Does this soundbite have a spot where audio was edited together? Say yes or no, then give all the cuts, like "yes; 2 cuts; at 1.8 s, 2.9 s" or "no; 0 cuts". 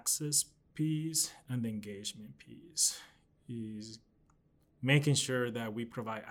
no; 0 cuts